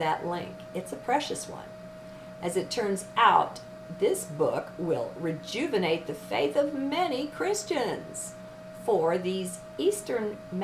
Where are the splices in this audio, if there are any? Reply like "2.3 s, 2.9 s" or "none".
none